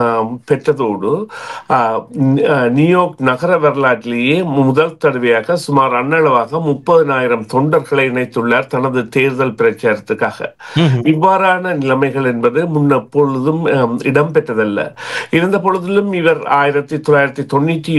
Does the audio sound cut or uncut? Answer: uncut